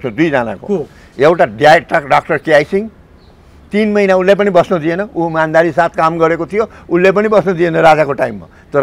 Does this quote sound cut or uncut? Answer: uncut